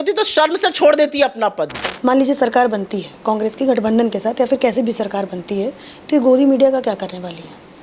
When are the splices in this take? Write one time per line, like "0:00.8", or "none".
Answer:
0:01.7